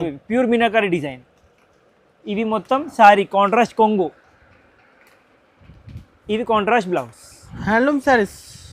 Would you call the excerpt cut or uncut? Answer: uncut